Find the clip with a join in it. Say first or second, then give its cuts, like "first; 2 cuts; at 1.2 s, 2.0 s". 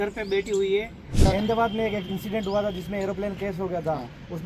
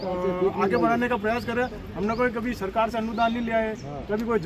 first; 1 cut; at 1.2 s